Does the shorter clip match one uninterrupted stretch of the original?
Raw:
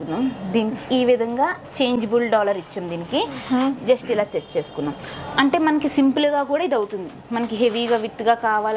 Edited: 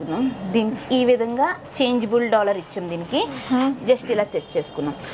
yes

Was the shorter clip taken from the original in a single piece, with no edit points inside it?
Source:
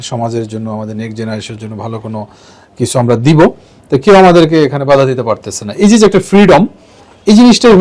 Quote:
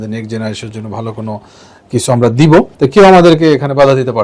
no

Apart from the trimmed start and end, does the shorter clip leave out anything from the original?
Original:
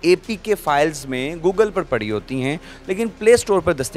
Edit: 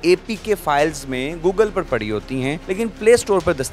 yes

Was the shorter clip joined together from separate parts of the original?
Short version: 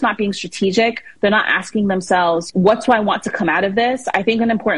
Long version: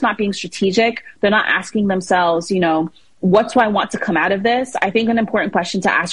yes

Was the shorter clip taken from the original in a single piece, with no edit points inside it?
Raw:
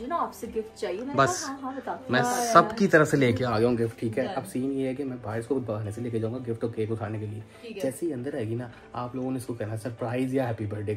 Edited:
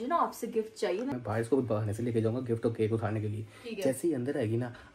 no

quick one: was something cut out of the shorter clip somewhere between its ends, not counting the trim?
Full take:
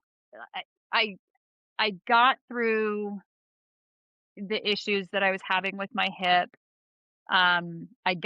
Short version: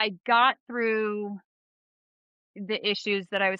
no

